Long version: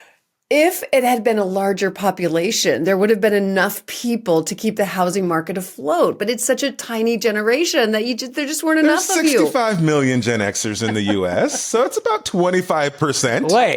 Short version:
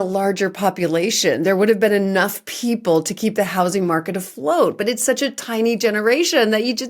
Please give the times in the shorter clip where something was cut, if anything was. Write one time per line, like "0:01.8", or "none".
none